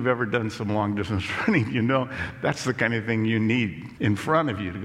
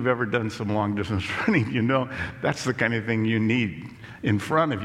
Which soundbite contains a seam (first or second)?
first